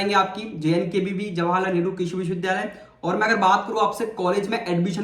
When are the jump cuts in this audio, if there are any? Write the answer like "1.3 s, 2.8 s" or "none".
none